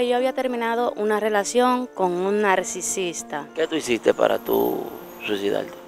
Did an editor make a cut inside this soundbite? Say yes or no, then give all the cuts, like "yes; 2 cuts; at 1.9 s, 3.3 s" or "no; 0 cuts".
yes; 1 cut; at 3.5 s